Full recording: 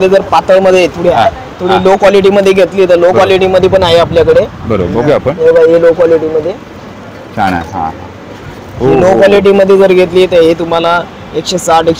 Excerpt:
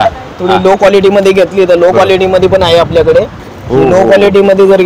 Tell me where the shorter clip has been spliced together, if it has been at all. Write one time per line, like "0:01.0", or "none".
0:03.4